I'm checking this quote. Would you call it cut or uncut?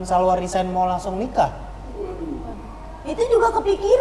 uncut